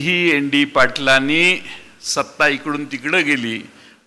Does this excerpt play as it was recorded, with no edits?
yes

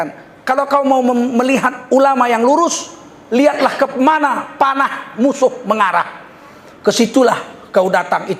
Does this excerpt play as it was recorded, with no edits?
yes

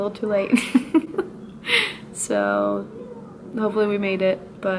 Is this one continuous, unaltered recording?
yes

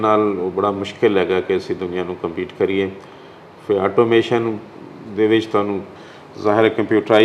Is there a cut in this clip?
no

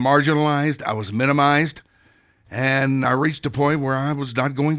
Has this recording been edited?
no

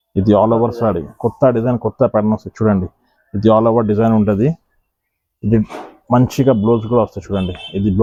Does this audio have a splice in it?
no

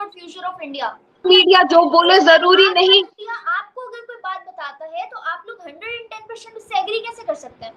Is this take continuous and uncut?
no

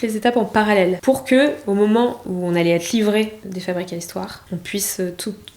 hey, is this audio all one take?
no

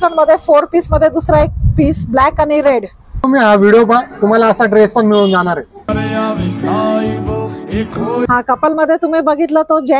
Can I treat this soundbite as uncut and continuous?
no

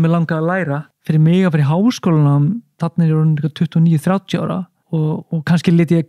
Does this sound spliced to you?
yes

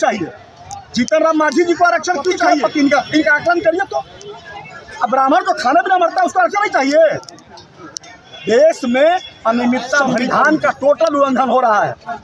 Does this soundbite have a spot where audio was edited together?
yes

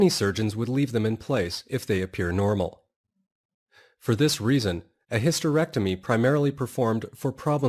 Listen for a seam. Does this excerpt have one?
yes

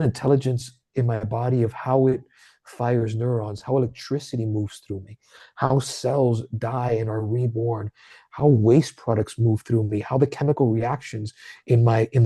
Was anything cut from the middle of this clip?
no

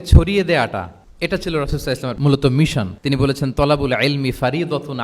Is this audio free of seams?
no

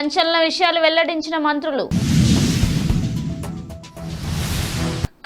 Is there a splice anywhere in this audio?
no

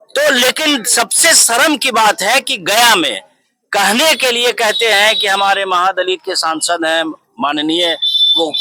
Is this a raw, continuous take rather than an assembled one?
yes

